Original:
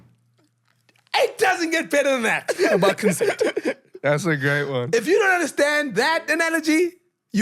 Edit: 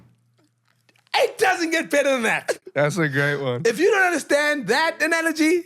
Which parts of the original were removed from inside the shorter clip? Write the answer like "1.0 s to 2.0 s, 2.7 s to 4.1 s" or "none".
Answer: 2.5 s to 3.8 s